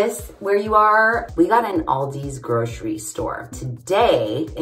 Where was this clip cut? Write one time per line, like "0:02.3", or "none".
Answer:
0:01.2
0:03.5